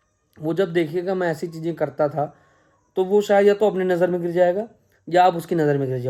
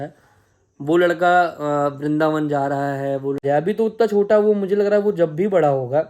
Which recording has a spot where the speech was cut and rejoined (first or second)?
second